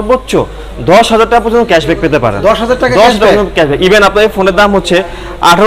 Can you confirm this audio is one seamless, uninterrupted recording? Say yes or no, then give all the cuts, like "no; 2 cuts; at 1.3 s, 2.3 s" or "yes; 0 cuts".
yes; 0 cuts